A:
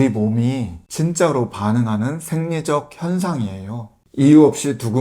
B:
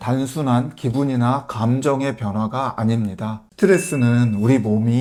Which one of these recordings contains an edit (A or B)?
A